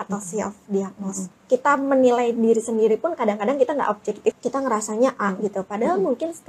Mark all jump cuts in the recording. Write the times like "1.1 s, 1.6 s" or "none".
1.3 s, 4.4 s